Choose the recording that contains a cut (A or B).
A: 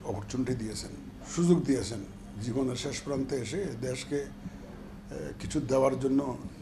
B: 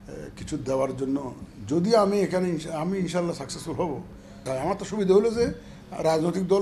B